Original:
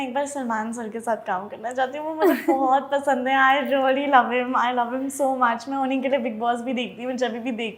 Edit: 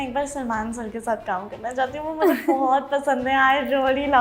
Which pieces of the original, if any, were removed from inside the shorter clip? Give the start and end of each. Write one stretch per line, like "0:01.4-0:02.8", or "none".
none